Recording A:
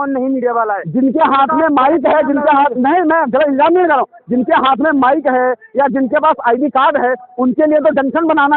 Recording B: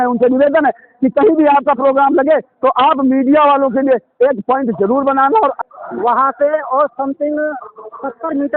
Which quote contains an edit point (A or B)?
B